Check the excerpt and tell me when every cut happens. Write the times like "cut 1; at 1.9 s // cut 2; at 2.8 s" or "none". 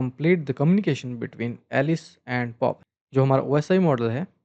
cut 1; at 2.8 s